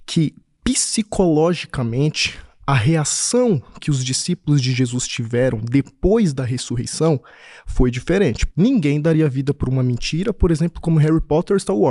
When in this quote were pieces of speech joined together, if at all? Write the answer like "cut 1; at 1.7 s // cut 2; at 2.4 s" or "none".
cut 1; at 8.4 s